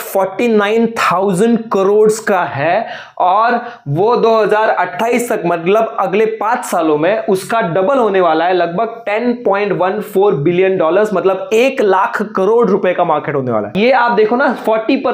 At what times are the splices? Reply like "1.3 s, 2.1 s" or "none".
13.7 s

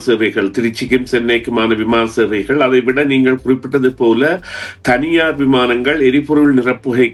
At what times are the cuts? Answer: none

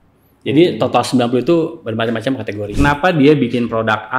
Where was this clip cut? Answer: 2.7 s

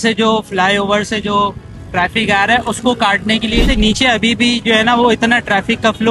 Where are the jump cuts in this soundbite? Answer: 3.7 s

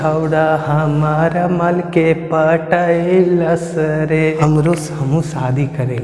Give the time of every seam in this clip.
4.4 s

